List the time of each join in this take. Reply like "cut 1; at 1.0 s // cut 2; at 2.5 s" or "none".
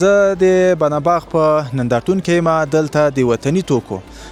none